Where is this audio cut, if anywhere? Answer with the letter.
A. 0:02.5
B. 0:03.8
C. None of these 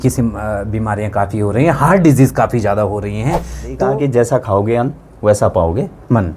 B